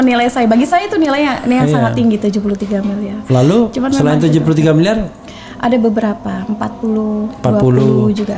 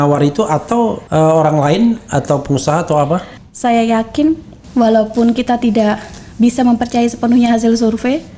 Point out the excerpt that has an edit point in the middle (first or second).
second